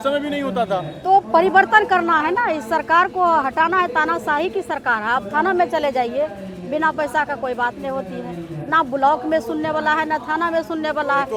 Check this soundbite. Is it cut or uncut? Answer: uncut